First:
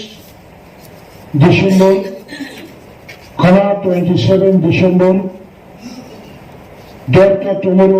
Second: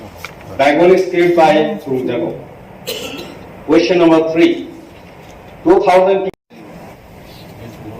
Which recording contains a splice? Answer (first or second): second